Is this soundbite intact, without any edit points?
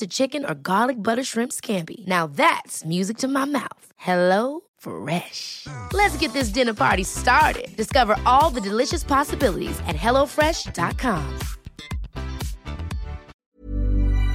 no; 1 cut; at 13.3 s

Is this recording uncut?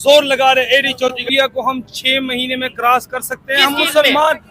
no; 1 cut; at 1.3 s

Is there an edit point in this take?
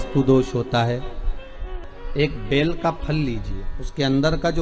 yes; 1 cut; at 1.7 s

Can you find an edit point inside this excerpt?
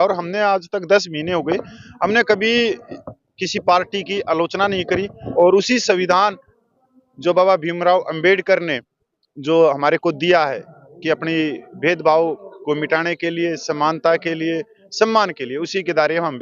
yes; 1 cut; at 5.2 s

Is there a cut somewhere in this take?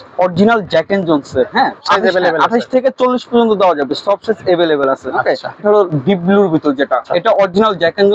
yes; 3 cuts; at 1.8 s, 5.6 s, 7.1 s

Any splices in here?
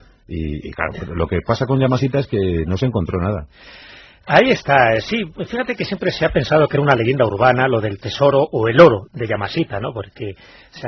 yes; 1 cut; at 1.4 s

